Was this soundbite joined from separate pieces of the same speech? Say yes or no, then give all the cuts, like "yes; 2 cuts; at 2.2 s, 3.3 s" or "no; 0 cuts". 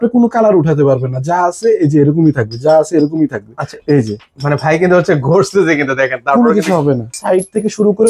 yes; 1 cut; at 7.2 s